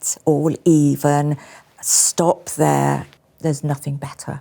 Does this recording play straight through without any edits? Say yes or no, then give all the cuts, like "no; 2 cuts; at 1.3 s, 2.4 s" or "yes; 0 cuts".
no; 1 cut; at 3.1 s